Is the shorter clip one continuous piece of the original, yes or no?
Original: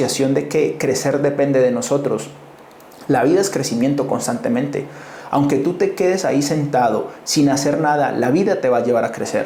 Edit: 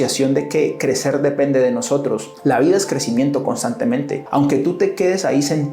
no